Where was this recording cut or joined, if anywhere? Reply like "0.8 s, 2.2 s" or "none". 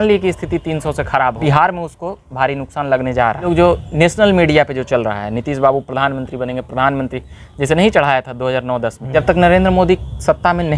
1.4 s, 3.4 s, 9.0 s